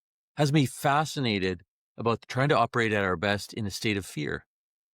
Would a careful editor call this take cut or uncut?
cut